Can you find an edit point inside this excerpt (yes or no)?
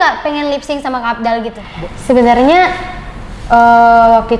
yes